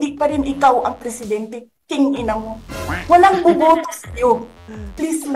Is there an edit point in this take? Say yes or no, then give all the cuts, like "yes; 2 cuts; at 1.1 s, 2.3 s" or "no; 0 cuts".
yes; 1 cut; at 2.5 s